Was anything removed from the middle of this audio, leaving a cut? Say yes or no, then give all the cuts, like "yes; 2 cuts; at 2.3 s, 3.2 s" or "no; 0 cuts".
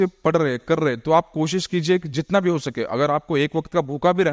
no; 0 cuts